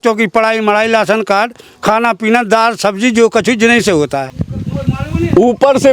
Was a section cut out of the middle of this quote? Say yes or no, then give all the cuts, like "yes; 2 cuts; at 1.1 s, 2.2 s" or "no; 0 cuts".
yes; 1 cut; at 4.2 s